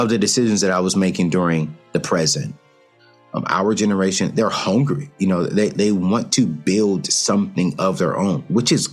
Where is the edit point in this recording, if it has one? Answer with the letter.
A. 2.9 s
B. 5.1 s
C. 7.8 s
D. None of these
A